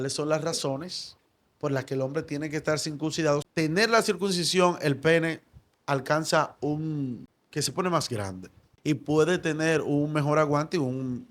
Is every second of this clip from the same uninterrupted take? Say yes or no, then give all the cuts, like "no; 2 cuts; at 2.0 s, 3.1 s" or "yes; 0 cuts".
no; 3 cuts; at 3.5 s, 7.3 s, 8.7 s